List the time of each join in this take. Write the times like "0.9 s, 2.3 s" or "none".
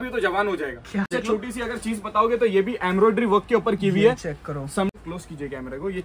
1.1 s, 4.9 s